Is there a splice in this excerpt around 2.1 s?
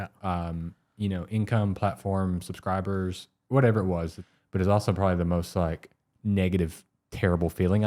no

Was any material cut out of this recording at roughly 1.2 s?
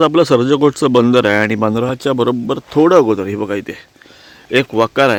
no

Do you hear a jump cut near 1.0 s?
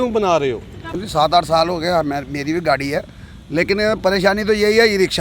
yes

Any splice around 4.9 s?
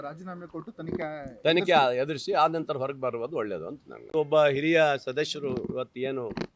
yes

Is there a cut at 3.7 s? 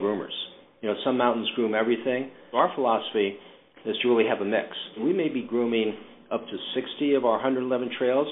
no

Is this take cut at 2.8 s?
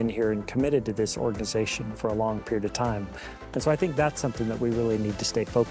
no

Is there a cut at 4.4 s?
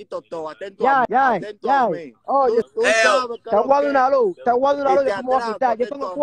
no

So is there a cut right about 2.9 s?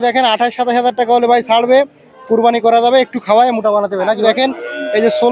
no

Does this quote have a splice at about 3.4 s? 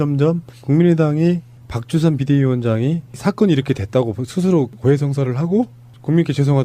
yes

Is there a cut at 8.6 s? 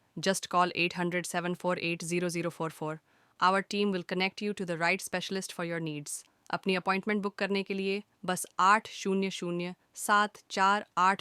no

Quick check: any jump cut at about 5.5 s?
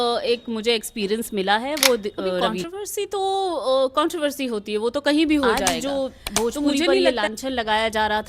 no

